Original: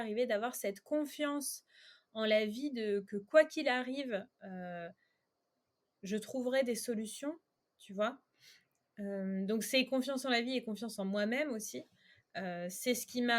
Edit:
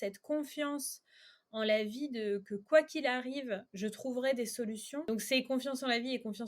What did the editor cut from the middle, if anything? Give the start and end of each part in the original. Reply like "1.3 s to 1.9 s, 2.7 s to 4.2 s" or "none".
4.3 s to 6.0 s, 7.3 s to 9.5 s